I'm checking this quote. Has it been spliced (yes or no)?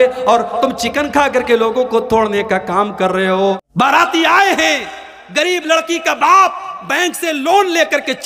yes